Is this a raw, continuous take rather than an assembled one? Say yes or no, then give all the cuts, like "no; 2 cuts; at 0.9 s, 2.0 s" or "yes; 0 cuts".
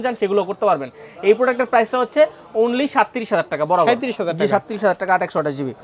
yes; 0 cuts